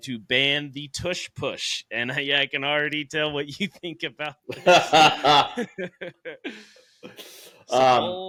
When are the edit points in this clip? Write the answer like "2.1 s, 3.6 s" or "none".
none